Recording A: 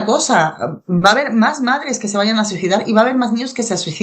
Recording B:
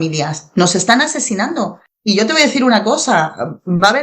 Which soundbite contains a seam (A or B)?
B